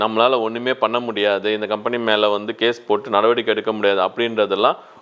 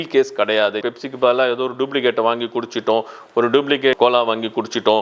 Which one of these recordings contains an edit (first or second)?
second